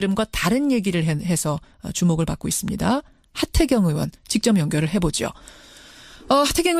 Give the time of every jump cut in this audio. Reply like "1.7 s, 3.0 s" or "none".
4.2 s